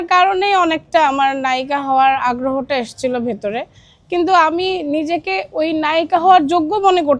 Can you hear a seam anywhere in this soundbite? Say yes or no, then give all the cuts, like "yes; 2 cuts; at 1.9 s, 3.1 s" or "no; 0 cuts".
no; 0 cuts